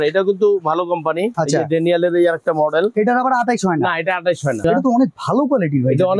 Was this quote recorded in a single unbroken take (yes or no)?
no